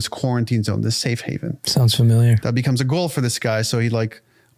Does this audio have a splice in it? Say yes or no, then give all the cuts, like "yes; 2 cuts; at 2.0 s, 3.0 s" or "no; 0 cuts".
no; 0 cuts